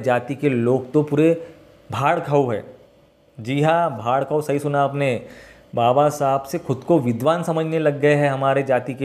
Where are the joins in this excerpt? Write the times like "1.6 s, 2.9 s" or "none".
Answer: none